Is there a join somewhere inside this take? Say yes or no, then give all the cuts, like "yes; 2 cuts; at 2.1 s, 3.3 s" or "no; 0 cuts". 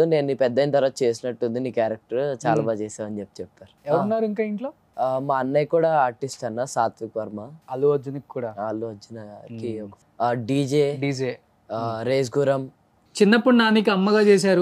yes; 4 cuts; at 3.7 s, 4.8 s, 7.5 s, 13.0 s